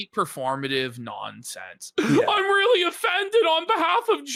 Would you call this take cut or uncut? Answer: uncut